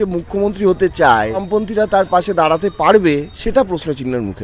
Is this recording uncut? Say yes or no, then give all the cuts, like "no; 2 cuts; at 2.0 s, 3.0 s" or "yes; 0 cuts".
no; 2 cuts; at 1.4 s, 3.3 s